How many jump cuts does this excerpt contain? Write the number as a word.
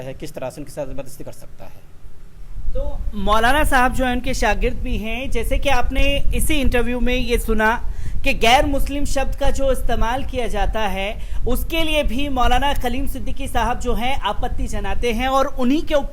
zero